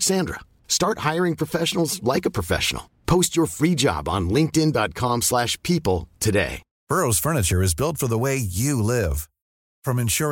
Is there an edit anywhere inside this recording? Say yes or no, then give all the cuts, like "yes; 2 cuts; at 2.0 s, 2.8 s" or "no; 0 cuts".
no; 0 cuts